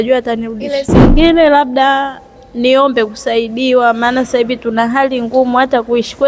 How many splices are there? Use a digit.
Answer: 1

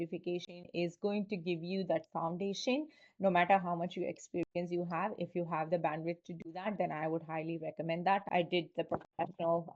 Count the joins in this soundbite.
0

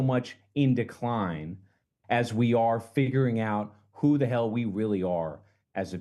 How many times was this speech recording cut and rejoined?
0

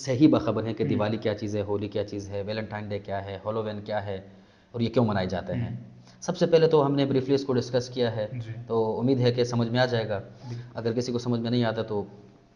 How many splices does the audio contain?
0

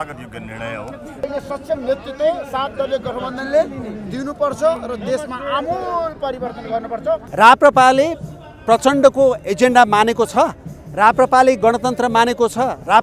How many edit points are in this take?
2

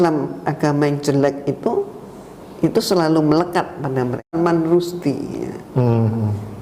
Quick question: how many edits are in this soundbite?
1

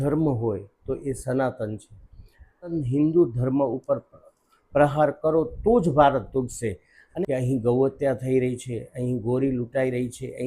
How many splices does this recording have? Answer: 2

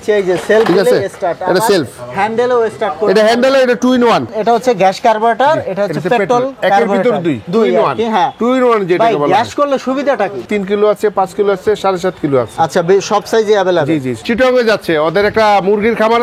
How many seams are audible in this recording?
3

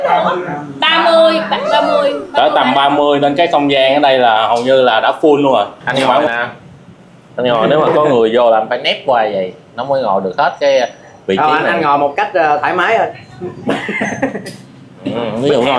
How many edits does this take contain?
1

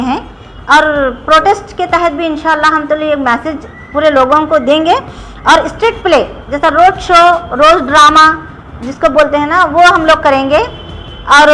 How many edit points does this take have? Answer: 0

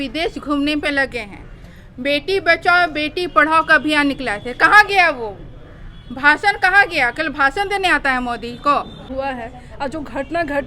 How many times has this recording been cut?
1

